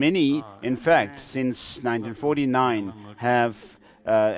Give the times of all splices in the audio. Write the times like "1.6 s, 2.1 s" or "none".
2.8 s